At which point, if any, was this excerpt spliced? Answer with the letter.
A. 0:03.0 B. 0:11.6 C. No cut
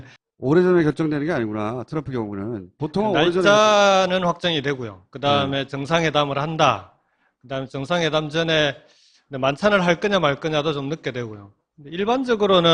C